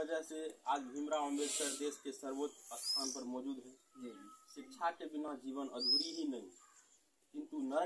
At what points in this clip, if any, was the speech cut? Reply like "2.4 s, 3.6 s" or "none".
none